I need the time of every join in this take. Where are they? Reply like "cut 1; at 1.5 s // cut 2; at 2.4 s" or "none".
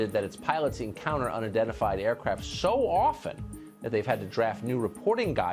none